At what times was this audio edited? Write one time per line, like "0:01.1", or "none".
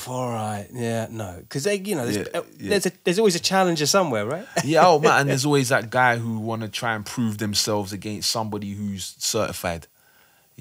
none